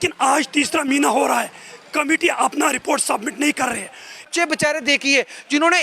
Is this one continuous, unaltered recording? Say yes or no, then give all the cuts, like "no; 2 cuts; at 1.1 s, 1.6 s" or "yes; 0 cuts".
no; 1 cut; at 4.3 s